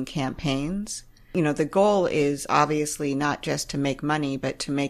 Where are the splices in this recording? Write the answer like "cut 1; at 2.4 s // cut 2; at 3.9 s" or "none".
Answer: cut 1; at 1.3 s